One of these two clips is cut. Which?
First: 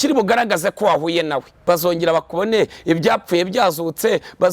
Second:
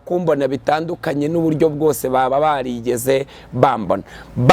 first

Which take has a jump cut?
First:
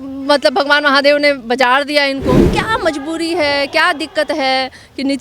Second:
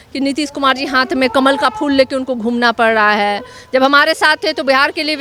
first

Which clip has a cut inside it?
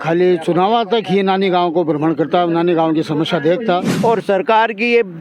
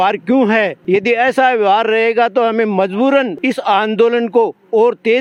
first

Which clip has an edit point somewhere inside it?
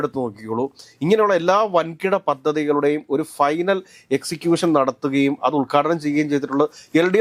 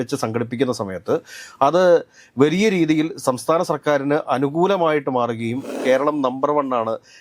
second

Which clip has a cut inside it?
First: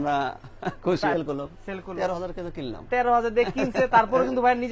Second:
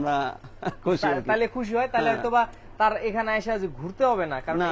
first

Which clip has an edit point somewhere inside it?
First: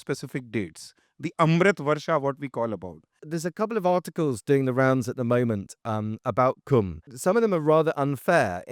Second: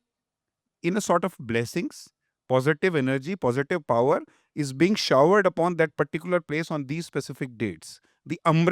first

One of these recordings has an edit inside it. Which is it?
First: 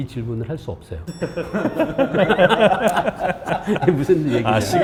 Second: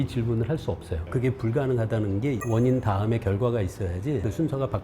second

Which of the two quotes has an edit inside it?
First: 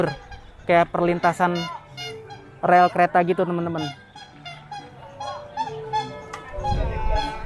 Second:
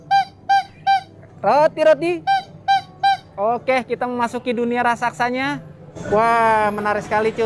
second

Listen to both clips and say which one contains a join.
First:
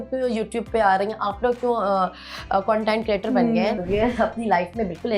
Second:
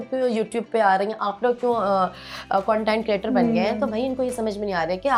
first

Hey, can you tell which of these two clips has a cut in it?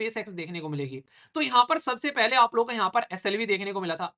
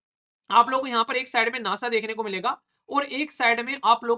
first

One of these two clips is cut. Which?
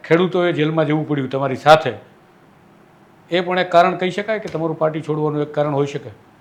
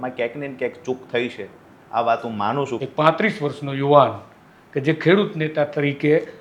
second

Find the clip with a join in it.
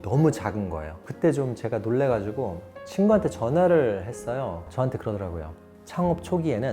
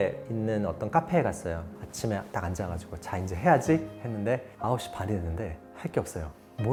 first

